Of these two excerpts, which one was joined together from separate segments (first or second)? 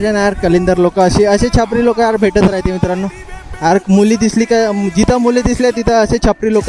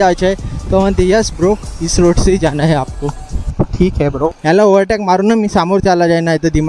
second